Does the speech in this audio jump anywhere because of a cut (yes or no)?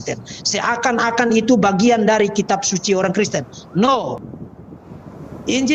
yes